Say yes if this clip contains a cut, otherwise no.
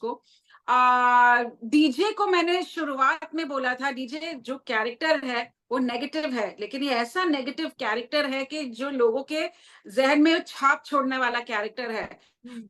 no